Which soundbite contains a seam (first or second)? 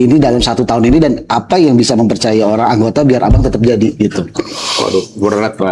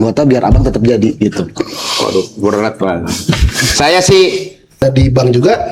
second